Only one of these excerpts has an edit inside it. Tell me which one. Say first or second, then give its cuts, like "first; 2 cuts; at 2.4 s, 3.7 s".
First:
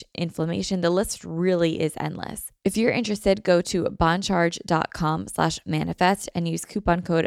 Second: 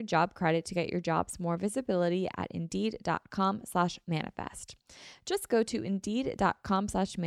first; 1 cut; at 2.4 s